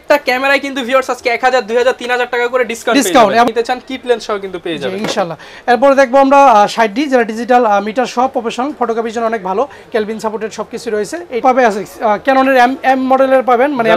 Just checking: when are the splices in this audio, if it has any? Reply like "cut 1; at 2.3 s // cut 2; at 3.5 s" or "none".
cut 1; at 3.5 s // cut 2; at 11.4 s